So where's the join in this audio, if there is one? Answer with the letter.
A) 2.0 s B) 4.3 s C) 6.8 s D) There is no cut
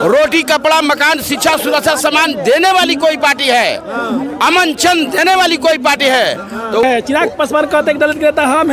C